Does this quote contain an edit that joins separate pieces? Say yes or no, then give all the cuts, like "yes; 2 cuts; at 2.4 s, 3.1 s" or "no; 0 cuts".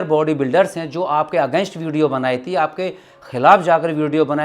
no; 0 cuts